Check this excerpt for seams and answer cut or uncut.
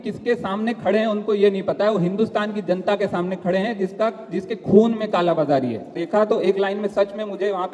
cut